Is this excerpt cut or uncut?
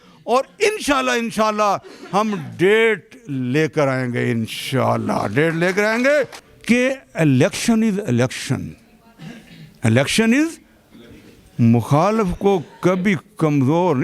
cut